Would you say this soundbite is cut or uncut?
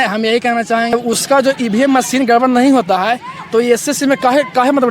cut